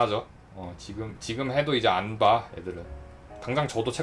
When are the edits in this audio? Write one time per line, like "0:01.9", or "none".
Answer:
none